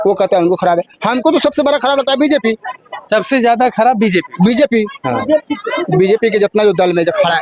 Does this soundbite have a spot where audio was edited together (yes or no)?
no